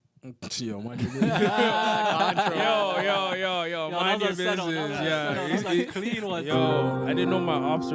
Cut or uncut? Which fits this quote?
uncut